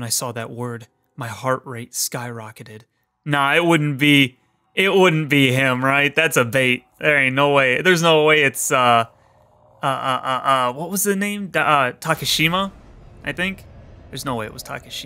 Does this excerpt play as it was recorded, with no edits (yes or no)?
yes